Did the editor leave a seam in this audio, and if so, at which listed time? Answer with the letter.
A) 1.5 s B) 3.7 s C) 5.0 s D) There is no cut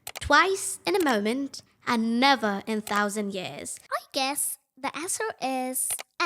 B